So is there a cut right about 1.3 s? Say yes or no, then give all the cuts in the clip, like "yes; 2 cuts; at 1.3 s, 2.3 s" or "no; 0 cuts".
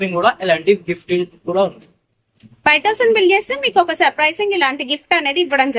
no; 0 cuts